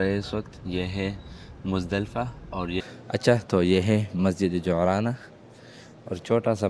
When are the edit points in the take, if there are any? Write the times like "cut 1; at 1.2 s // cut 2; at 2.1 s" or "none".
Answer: cut 1; at 3.1 s